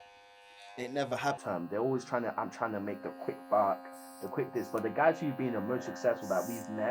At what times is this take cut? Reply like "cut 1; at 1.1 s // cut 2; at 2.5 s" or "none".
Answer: cut 1; at 1.4 s